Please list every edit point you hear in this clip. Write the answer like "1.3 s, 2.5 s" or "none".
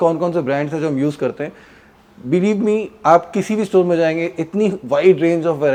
none